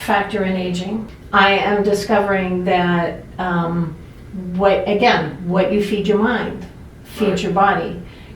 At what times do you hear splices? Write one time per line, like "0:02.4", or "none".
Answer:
0:01.2